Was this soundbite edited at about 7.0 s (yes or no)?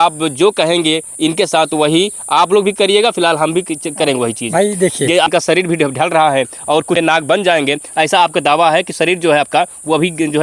yes